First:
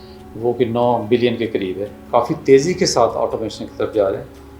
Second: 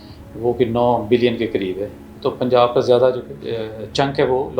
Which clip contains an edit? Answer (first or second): first